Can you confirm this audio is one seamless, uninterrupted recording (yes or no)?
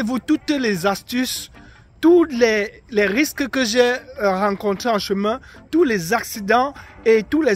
yes